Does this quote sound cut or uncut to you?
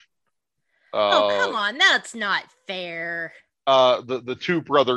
uncut